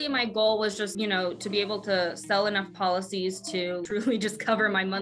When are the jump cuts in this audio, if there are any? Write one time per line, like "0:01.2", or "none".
0:00.9
0:03.8